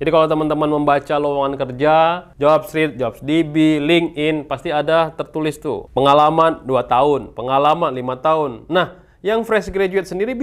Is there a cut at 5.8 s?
yes; 2 cuts; at 2.3 s, 5.8 s

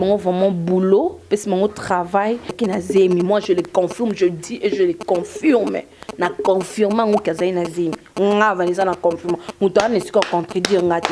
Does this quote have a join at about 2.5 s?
yes; 1 cut; at 2.5 s

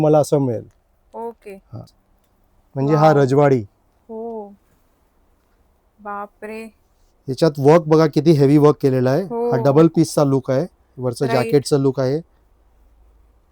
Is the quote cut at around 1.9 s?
yes; 1 cut; at 1.9 s

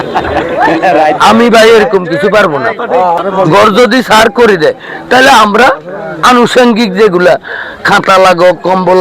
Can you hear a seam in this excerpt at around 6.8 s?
no; 1 cut; at 3.2 s

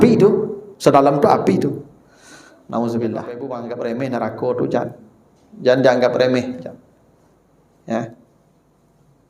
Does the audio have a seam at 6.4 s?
no; 1 cut; at 3.5 s

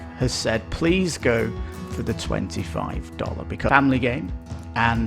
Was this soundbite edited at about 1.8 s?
no; 1 cut; at 3.7 s

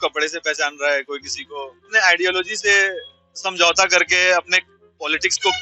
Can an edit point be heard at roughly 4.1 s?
no; 1 cut; at 1.9 s

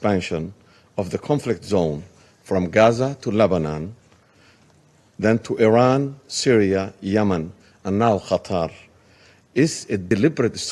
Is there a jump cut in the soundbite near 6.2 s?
no; 0 cuts

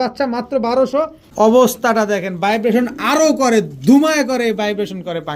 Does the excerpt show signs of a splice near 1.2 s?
yes; 1 cut; at 1.2 s

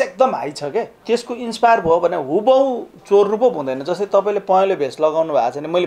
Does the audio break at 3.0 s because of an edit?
no; 1 cut; at 1.0 s

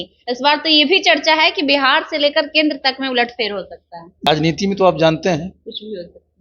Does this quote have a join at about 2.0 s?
no; 1 cut; at 4.3 s

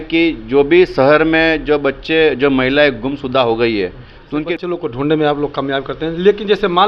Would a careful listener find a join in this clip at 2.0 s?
no; 1 cut; at 4.6 s

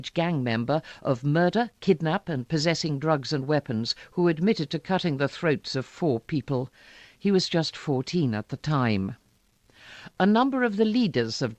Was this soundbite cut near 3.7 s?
yes; 1 cut; at 3.7 s

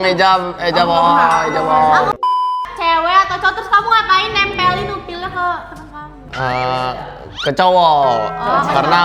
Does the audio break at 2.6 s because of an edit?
yes; 1 cut; at 2.6 s

